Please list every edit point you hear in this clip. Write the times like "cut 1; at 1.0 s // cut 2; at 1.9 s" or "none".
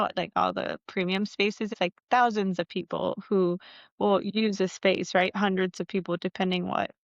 cut 1; at 1.7 s